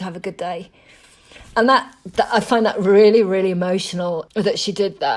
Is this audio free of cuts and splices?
no; 1 cut; at 4.3 s

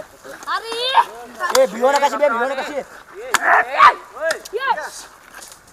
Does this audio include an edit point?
no; 0 cuts

